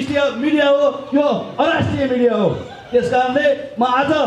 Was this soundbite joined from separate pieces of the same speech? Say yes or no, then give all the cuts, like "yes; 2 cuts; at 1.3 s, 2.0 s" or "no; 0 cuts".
no; 0 cuts